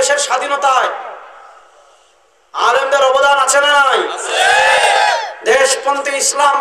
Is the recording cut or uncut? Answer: uncut